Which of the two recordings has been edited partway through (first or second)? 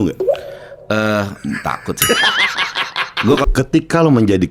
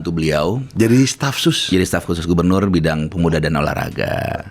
first